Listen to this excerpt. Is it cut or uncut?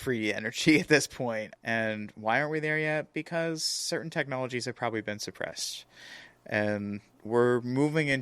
cut